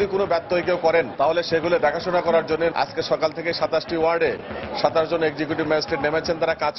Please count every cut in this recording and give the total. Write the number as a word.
two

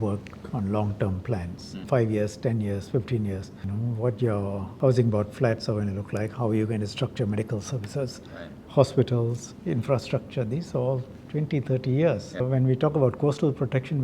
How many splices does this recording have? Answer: four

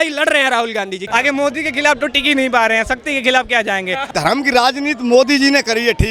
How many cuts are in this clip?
two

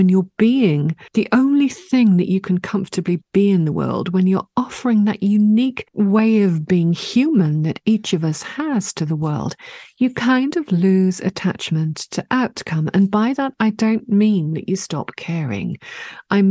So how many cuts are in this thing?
two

